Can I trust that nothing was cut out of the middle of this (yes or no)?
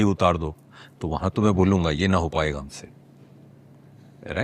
yes